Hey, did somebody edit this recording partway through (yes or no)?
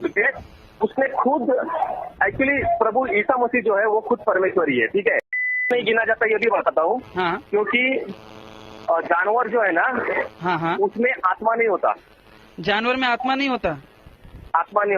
yes